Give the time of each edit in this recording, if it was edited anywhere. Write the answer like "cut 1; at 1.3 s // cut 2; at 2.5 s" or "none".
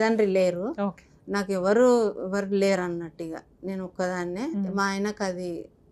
none